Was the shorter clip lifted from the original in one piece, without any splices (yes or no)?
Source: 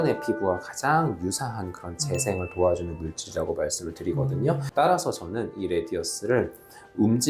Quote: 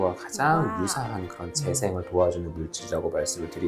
yes